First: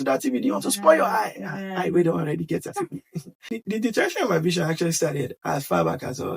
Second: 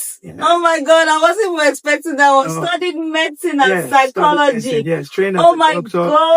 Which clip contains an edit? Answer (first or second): first